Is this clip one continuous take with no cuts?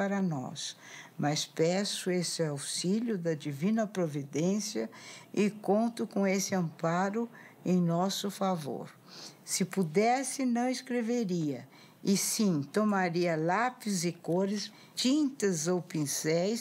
no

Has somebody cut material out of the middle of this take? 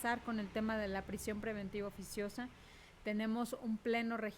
no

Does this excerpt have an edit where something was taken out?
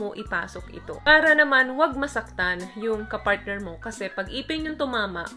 yes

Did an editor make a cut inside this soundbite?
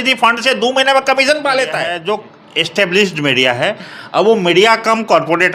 yes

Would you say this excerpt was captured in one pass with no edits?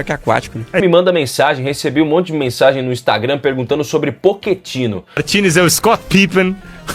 no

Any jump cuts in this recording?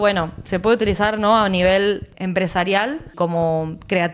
yes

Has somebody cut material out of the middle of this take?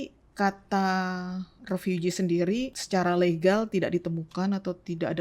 yes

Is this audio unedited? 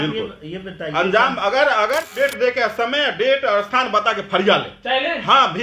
no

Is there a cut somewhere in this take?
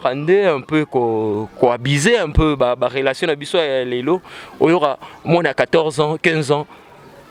no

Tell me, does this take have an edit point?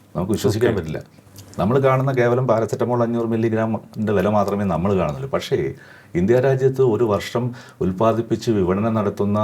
no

